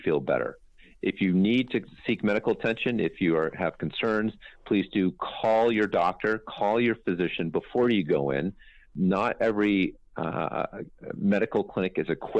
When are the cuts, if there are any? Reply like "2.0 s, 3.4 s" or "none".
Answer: 8.9 s